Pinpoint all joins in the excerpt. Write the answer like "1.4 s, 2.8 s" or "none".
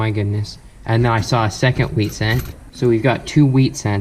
2.6 s